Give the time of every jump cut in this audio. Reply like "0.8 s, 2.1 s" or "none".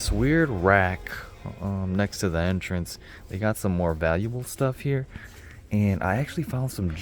none